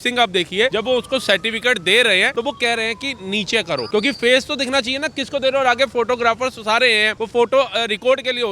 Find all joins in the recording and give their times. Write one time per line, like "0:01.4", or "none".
0:00.7
0:02.3
0:03.9
0:07.1